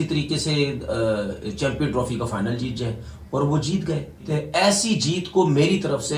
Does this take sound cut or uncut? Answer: cut